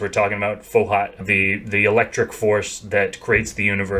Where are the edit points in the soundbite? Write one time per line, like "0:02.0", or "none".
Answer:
0:01.2